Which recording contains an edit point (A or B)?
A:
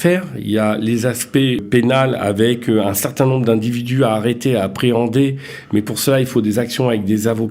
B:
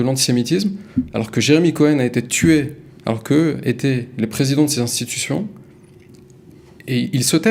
A